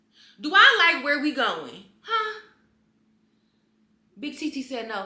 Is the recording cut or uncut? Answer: uncut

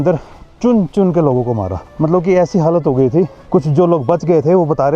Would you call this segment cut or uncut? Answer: uncut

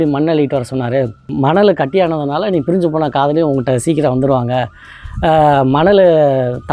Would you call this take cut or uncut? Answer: cut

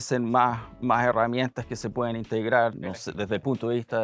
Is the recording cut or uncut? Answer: cut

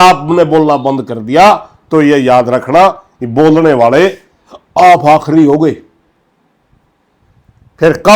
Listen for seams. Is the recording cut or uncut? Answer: uncut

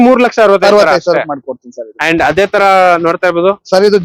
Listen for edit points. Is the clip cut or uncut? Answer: uncut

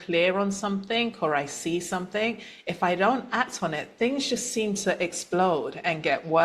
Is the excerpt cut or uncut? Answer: uncut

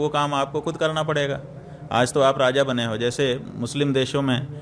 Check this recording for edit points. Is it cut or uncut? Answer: uncut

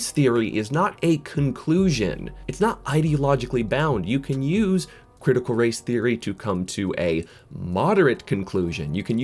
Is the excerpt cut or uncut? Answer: uncut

